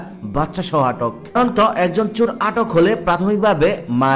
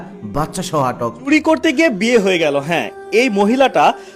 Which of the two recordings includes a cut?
second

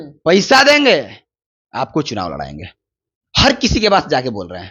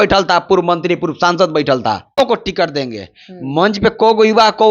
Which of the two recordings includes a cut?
second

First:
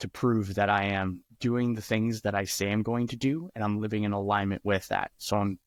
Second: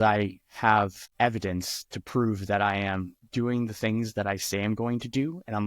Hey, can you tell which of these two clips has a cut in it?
second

